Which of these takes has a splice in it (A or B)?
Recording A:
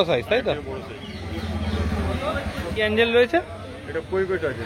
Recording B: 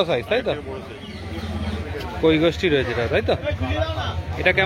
B